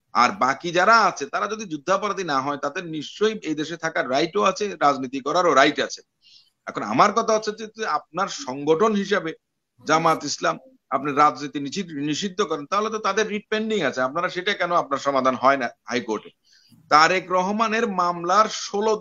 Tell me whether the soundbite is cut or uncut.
uncut